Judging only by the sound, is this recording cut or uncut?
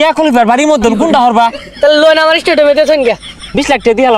cut